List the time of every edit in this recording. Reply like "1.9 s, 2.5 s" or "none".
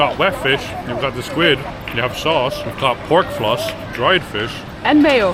1.7 s, 2.7 s, 3.8 s